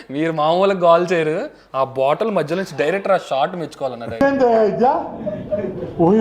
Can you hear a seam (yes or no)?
yes